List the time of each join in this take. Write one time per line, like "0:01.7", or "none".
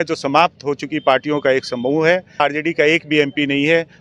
0:02.4